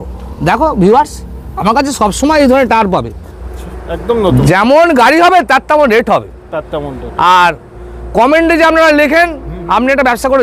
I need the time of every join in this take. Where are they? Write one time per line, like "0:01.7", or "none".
none